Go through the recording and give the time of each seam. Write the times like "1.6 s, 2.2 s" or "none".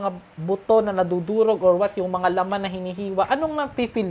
none